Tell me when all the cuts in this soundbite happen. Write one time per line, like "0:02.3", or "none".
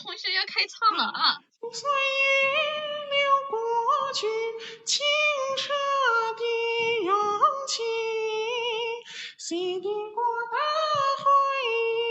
0:01.5